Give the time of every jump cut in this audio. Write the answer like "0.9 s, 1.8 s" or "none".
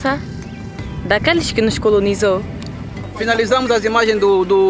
3.0 s